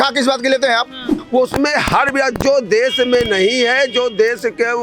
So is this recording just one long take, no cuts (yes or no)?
no